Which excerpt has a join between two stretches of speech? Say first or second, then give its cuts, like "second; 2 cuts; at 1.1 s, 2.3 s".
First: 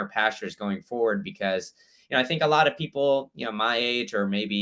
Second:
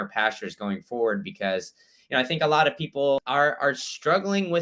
second; 1 cut; at 3.2 s